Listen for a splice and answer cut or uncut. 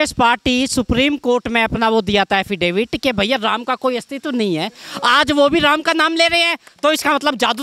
uncut